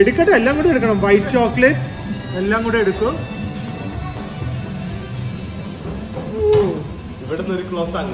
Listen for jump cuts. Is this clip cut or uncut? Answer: uncut